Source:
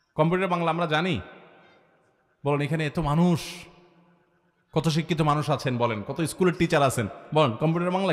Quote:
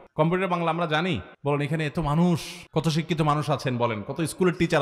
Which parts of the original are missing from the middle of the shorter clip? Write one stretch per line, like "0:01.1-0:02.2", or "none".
0:01.3-0:02.3
0:03.6-0:04.6